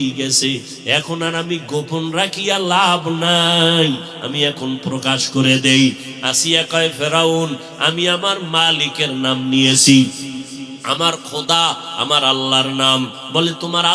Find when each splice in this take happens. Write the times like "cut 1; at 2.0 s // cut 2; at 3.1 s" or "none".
none